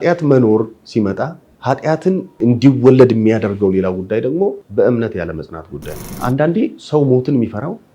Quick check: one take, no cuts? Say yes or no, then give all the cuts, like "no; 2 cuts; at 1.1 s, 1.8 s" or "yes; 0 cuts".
no; 4 cuts; at 1.5 s, 2.3 s, 4.6 s, 6.2 s